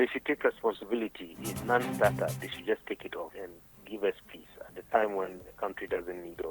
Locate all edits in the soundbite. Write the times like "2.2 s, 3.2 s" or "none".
1.5 s, 3.3 s

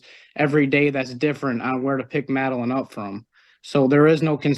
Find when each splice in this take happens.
none

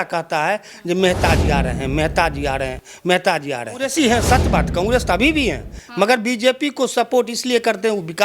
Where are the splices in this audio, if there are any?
3.9 s

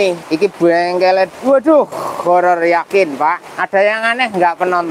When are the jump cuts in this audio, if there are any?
none

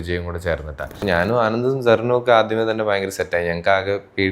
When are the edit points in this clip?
1.0 s

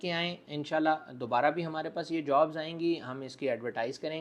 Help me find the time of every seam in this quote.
none

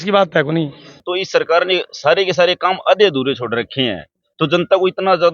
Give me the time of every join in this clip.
1.1 s

